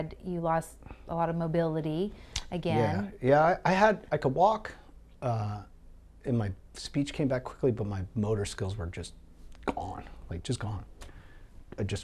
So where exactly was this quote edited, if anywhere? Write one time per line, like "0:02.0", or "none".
0:11.0